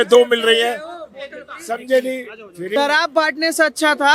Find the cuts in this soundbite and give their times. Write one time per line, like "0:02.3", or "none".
0:02.7